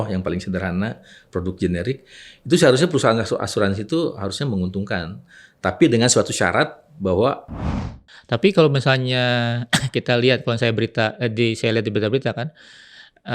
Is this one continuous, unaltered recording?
no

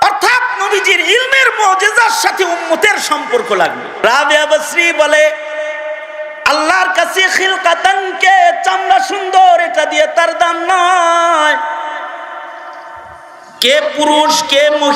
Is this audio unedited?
no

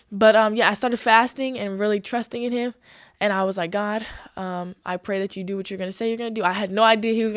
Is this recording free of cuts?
yes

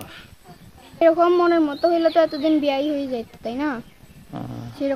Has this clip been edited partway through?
yes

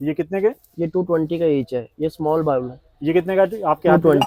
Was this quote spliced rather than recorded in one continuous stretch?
no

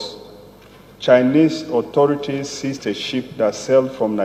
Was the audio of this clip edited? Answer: no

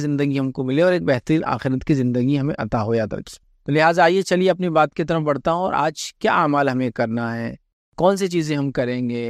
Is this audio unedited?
yes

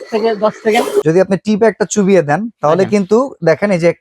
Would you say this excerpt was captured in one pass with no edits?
no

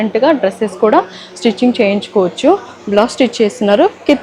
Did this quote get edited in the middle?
no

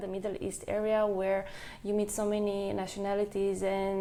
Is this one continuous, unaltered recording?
yes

